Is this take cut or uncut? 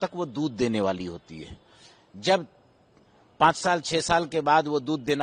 uncut